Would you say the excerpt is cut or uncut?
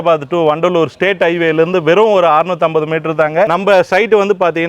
uncut